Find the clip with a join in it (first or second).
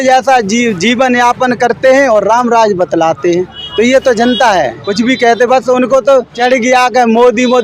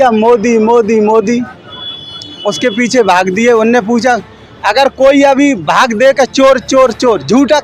first